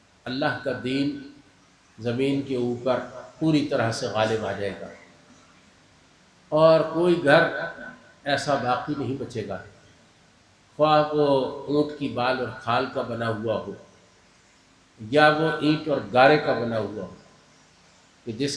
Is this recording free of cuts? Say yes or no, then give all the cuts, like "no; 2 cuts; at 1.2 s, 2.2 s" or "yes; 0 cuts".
yes; 0 cuts